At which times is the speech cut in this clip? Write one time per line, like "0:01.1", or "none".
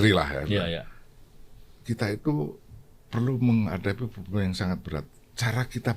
none